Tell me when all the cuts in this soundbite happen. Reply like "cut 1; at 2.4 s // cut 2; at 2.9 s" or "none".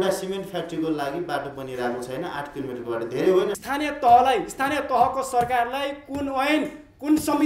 cut 1; at 3.6 s